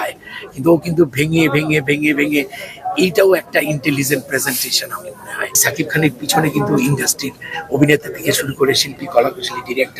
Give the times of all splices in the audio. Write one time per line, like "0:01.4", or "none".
0:05.6